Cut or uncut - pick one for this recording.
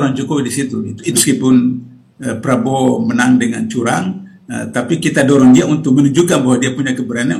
cut